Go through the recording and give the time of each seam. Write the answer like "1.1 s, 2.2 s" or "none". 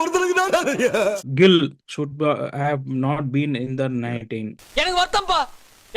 1.3 s, 4.6 s